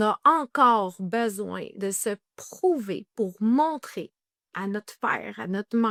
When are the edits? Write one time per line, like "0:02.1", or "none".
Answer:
none

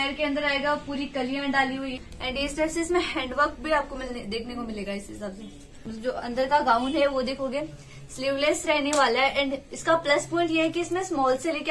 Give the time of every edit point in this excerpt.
0:01.9
0:05.8

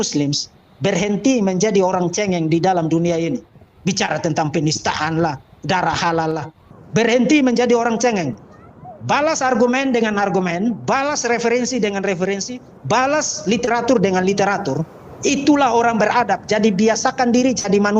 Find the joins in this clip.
0:03.5
0:06.5

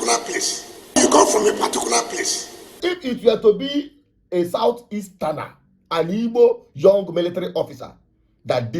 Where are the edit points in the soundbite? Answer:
0:01.0
0:02.8

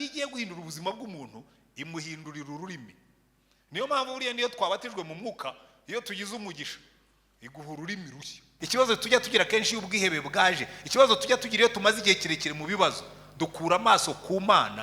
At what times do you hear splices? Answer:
0:08.4

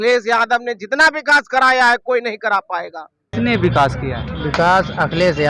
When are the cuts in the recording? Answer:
0:03.3

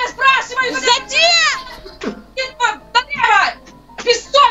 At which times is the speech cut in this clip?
none

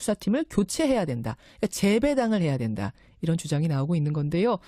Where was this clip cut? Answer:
0:02.4

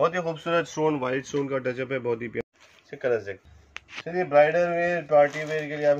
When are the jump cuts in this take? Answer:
0:02.4

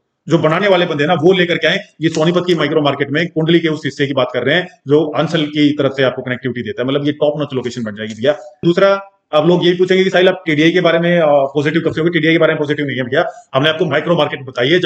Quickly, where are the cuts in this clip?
0:08.6

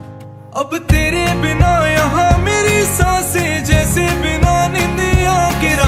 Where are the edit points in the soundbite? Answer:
none

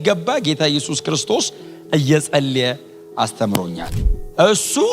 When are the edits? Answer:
0:03.9

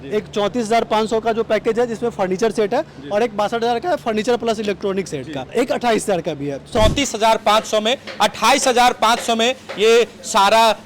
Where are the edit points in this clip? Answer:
0:05.5
0:06.7

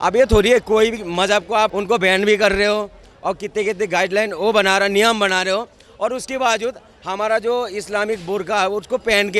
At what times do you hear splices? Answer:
0:01.8

